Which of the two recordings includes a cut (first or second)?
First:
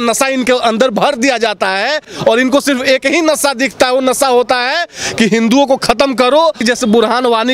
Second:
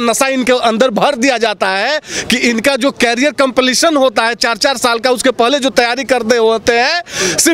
first